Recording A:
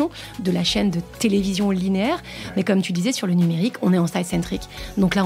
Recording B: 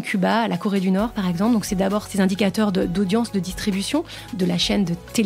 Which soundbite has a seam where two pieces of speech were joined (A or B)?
B